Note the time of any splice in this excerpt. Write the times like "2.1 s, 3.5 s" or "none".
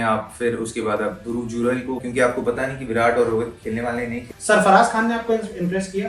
2.0 s, 4.2 s